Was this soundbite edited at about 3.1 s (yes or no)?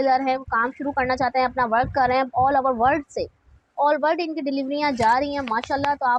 no